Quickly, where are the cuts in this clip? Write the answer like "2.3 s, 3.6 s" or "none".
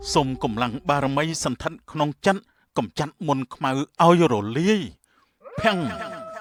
none